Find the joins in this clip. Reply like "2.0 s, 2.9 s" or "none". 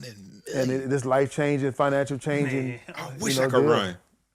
none

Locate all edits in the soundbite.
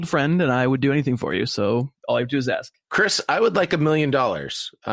1.9 s, 2.8 s

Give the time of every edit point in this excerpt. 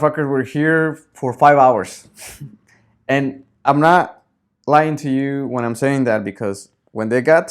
1.1 s

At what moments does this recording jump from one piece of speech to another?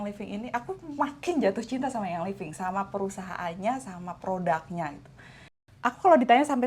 5.7 s

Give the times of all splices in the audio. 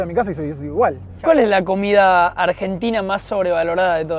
1.1 s

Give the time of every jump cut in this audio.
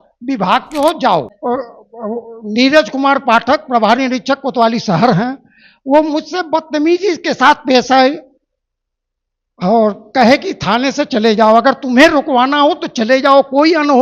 1.3 s

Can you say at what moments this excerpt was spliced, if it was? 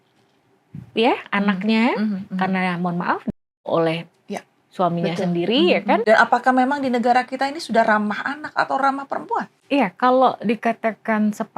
6.0 s, 9.5 s

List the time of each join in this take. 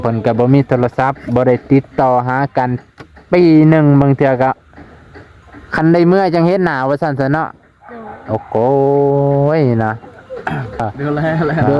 10.8 s

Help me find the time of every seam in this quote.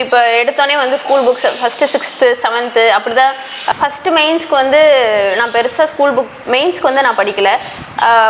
3.6 s

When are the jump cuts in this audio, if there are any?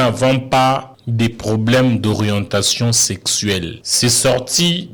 1.0 s, 3.8 s

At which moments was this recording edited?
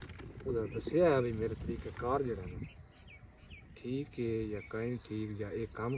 none

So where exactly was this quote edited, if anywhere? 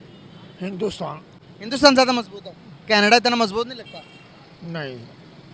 none

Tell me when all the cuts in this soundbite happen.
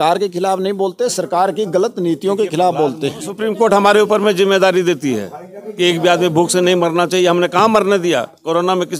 3.4 s

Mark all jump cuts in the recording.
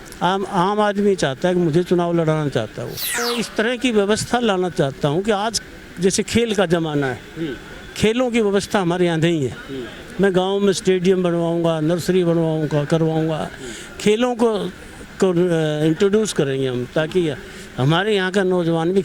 3.2 s

